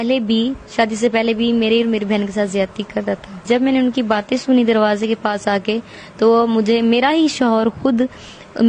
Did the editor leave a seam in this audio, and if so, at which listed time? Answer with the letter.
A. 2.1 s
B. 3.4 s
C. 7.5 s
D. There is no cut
B